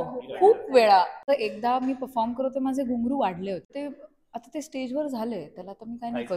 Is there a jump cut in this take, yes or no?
yes